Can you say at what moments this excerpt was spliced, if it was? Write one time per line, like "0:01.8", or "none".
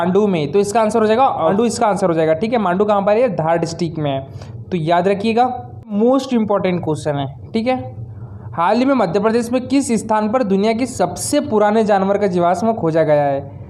0:01.5
0:05.9